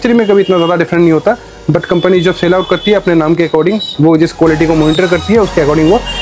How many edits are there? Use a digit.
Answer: 0